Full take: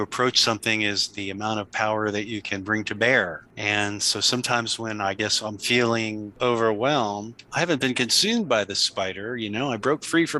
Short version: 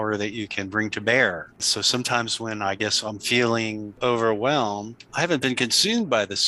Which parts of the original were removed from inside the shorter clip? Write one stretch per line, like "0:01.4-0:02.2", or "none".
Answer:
0:03.6-0:04.0